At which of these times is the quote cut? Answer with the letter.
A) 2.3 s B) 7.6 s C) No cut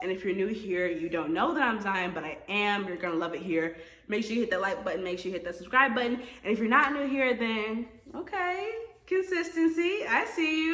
C